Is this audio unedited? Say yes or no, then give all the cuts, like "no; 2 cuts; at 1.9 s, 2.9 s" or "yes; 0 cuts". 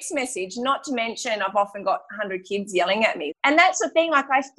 no; 1 cut; at 3.4 s